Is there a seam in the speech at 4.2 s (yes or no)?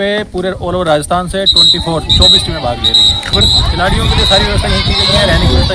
no